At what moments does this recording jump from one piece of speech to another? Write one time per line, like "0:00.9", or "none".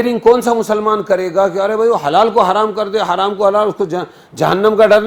none